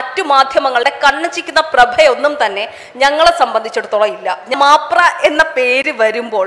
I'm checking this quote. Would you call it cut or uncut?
cut